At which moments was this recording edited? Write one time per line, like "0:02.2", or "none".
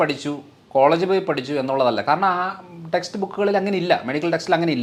none